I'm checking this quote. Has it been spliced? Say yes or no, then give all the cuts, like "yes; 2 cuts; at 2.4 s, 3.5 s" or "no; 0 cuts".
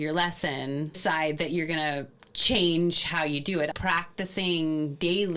no; 0 cuts